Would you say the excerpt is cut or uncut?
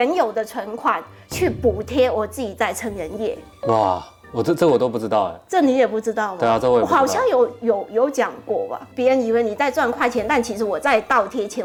uncut